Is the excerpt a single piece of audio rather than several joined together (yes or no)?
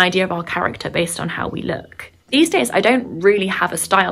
yes